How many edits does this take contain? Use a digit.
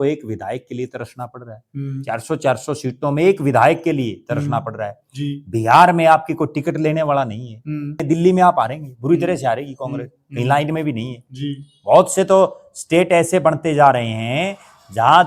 1